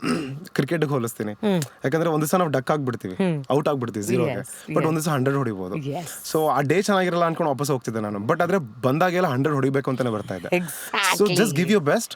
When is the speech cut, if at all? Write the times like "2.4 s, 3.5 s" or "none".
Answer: none